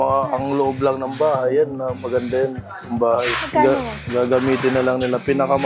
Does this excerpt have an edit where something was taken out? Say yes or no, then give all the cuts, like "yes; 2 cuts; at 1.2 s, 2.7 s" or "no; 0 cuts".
no; 0 cuts